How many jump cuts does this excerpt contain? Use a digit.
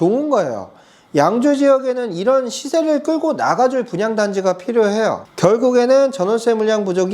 1